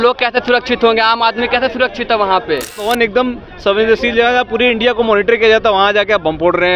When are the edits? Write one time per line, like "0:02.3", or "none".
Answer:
0:02.8